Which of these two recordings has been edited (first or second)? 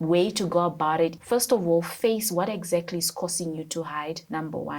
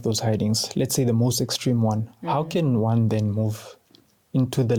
first